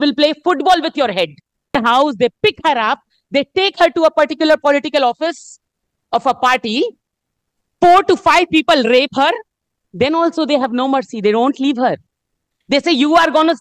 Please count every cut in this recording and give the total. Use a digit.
1